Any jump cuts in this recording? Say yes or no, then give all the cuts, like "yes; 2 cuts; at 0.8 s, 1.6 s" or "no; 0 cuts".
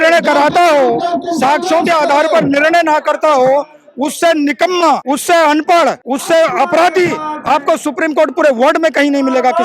yes; 2 cuts; at 5.0 s, 6.1 s